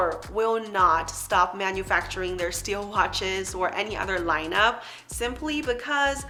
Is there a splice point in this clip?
no; 0 cuts

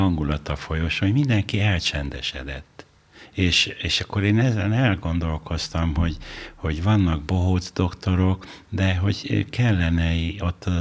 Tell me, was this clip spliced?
yes; 1 cut; at 3.2 s

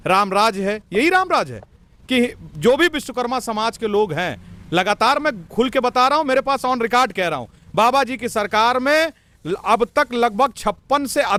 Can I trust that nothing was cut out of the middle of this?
yes; 0 cuts

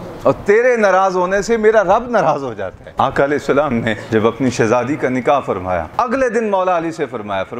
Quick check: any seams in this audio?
yes; 3 cuts; at 2.8 s, 4.0 s, 5.9 s

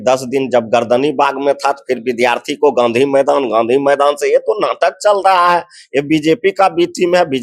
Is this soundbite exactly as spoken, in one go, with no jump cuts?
yes; 0 cuts

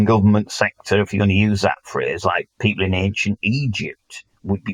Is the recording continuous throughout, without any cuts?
yes; 0 cuts

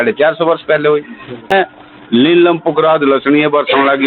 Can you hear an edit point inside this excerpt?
yes; 1 cut; at 1.5 s

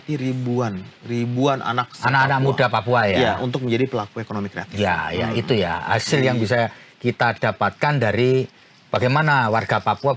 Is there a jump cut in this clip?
no; 0 cuts

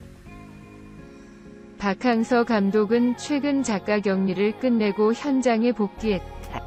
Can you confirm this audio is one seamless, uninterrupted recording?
yes; 0 cuts

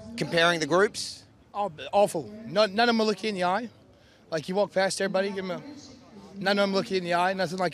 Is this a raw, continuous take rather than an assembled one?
yes; 0 cuts

